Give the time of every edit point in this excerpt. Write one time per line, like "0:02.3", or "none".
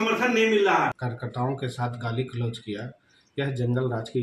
0:01.1